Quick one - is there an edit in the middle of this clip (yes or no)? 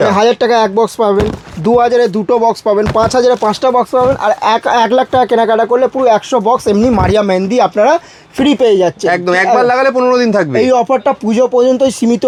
no